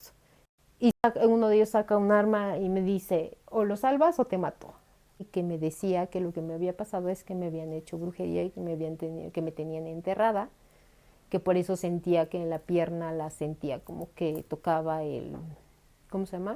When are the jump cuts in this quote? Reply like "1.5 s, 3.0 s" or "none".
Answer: 5.3 s

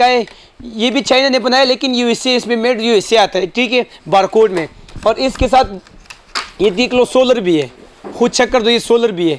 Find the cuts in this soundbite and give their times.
none

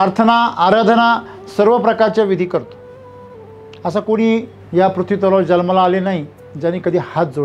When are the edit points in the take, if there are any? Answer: 4.6 s

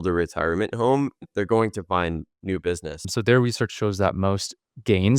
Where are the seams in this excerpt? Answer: 3.0 s

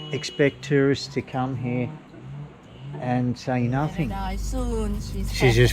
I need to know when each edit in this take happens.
4.1 s

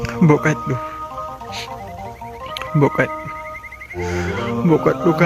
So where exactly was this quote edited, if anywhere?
0.8 s, 2.7 s

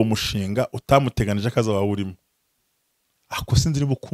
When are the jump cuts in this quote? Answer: none

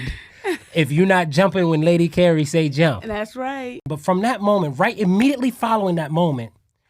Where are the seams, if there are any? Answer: 3.9 s

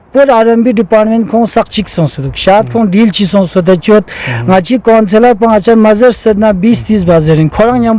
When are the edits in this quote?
none

